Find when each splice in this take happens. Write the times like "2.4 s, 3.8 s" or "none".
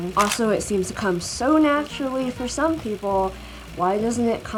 none